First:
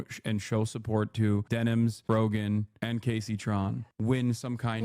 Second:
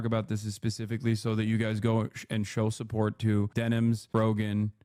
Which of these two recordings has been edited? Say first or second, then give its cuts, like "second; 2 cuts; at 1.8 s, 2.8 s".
first; 1 cut; at 3.8 s